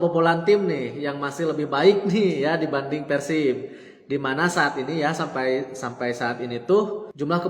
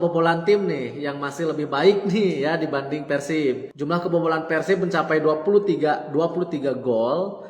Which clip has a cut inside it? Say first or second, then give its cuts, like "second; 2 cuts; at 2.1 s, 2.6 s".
second; 1 cut; at 3.7 s